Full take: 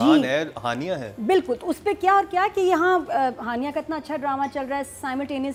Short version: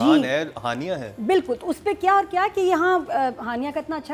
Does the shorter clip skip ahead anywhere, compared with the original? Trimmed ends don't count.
no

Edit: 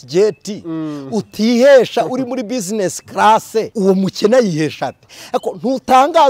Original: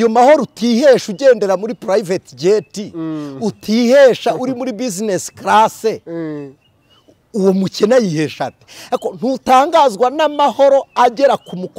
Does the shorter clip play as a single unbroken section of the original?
no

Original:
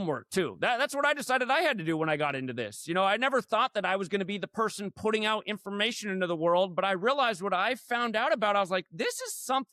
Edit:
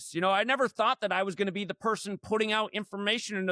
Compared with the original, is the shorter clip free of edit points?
yes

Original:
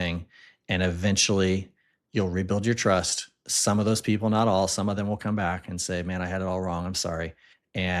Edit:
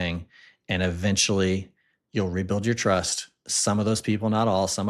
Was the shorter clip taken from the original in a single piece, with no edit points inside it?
yes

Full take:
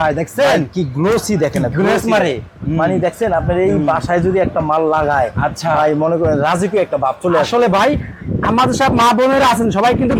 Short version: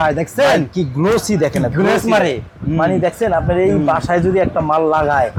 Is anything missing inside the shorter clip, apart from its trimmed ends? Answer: no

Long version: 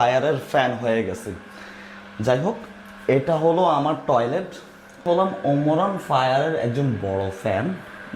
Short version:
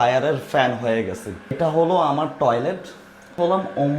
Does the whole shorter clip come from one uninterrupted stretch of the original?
no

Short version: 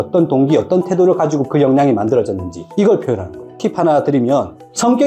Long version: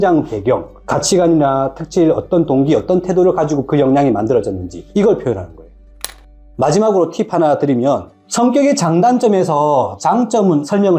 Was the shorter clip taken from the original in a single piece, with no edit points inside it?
no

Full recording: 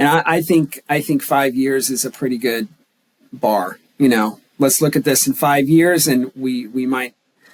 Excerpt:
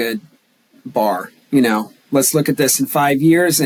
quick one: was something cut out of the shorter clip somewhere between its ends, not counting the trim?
no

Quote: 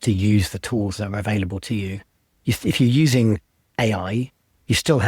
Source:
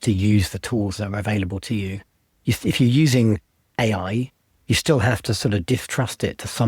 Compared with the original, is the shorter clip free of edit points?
yes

